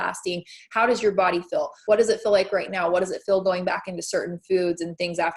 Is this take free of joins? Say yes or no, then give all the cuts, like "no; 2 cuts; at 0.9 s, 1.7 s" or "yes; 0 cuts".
no; 1 cut; at 1.7 s